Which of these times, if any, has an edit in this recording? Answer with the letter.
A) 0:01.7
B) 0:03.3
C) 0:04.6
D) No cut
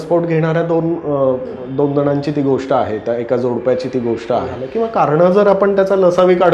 C